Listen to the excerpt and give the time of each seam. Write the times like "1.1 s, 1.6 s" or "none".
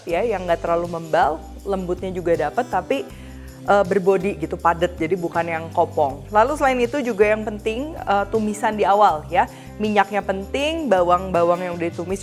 none